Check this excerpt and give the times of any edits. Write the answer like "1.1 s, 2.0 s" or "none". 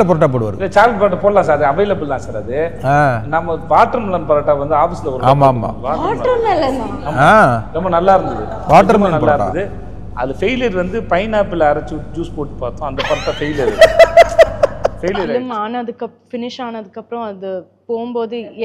15.2 s